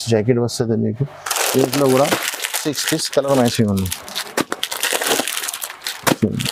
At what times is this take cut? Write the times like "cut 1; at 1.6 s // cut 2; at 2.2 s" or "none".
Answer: none